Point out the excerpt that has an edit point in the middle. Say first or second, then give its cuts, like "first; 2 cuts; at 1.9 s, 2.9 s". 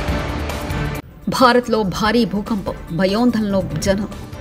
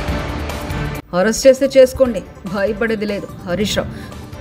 first; 1 cut; at 1.0 s